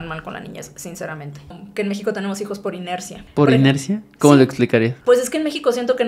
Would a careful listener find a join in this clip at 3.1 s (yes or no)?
yes